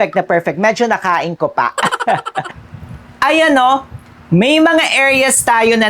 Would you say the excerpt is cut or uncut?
cut